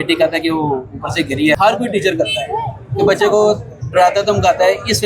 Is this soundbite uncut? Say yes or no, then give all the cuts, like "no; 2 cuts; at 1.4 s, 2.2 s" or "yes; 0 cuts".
no; 1 cut; at 1.5 s